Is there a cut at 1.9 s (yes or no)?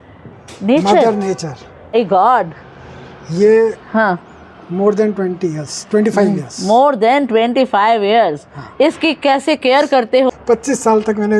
yes